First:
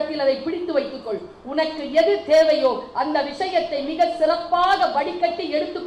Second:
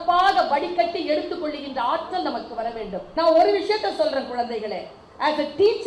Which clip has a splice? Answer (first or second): second